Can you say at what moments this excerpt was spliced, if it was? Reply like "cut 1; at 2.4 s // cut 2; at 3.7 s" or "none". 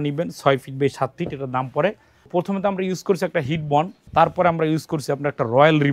cut 1; at 2.3 s // cut 2; at 4.0 s